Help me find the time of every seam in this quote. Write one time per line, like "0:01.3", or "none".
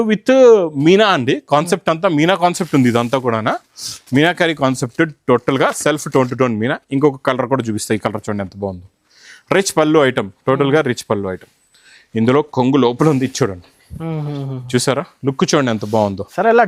none